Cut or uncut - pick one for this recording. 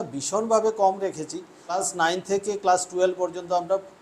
cut